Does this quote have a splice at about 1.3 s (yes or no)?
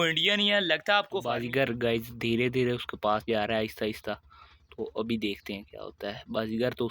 yes